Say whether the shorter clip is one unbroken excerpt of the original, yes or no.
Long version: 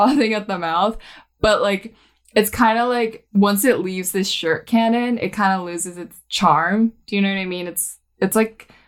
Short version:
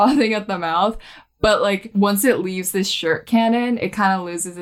no